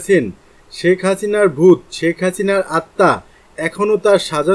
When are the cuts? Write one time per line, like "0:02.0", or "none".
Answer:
none